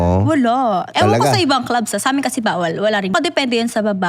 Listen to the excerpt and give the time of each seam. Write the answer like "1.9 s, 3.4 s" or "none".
0.9 s, 3.1 s